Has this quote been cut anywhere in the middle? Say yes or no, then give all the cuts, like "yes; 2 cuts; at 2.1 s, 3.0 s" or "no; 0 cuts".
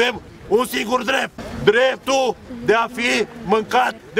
yes; 1 cut; at 1.5 s